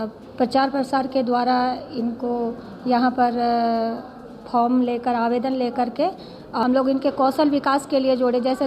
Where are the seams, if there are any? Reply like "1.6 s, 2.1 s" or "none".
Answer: 6.6 s

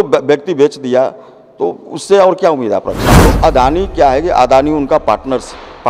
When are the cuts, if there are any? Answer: 3.2 s

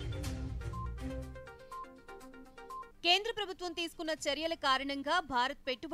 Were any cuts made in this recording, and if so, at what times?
2.9 s

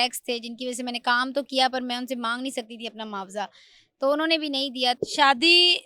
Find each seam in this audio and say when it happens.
5.0 s

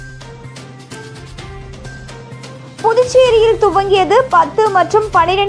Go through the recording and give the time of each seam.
none

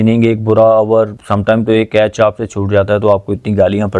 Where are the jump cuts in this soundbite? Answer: 1.2 s

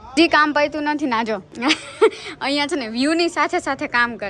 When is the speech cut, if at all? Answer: 1.5 s

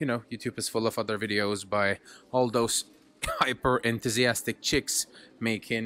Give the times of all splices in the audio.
none

